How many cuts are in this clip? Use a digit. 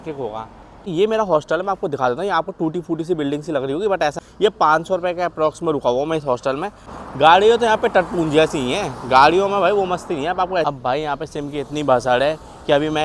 4